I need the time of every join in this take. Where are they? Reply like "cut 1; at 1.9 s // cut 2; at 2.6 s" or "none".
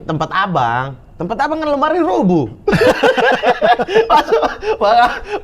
none